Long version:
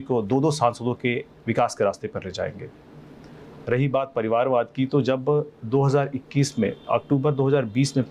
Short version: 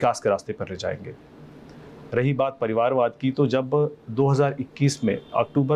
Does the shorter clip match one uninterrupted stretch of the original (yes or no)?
yes